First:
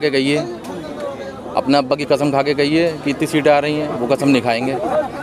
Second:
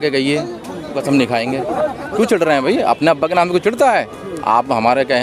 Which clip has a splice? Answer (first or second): second